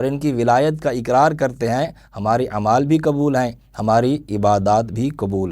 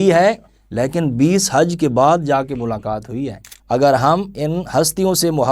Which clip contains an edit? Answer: second; 1 cut; at 3.5 s

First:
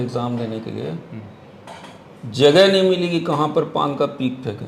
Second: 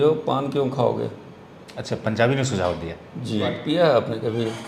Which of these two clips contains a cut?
second; 1 cut; at 3.6 s

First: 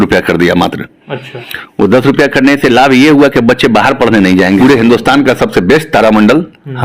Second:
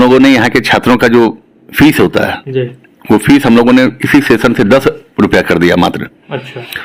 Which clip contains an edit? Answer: first; 1 cut; at 4.6 s

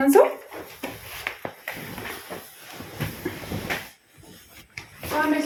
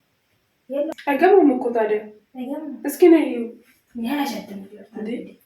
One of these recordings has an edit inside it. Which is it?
second; 1 cut; at 0.9 s

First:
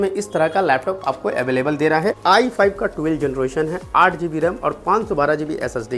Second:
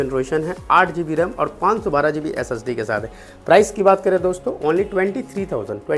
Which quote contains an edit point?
first; 1 cut; at 2.2 s

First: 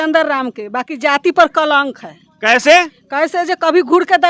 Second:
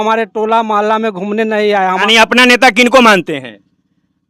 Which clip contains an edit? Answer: second; 1 cut; at 2.0 s

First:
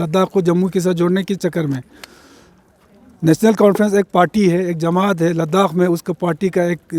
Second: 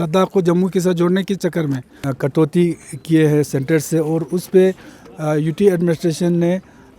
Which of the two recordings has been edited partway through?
second; 1 cut; at 1.9 s

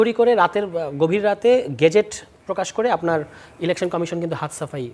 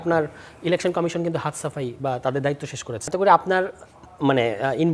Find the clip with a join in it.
second; 1 cut; at 3.0 s

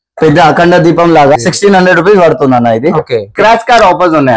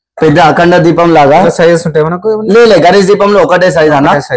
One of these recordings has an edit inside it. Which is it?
first; 2 cuts; at 1.4 s, 3.3 s

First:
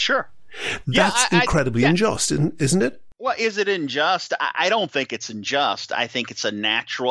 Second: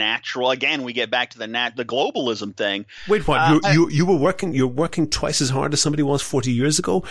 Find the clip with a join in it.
first; 1 cut; at 3.1 s

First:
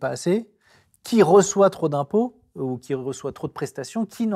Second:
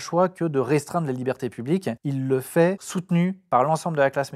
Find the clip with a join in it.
second; 2 cuts; at 2.0 s, 2.9 s

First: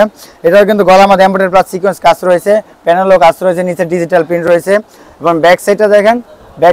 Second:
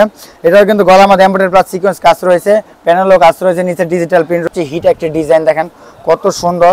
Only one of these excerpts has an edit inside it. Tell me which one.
second; 1 cut; at 4.5 s

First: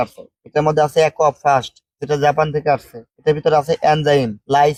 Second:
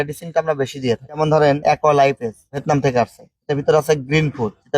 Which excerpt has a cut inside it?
second; 1 cut; at 1.4 s

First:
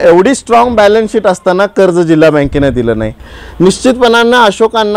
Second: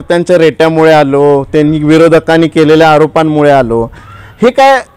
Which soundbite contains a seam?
first; 1 cut; at 3.2 s

